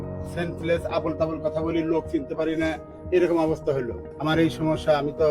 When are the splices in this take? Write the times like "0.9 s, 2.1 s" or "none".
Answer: 4.0 s